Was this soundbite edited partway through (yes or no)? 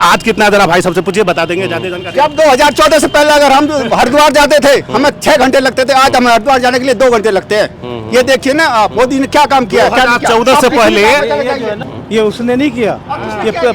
yes